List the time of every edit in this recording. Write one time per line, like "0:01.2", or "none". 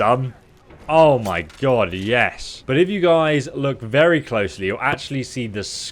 0:02.5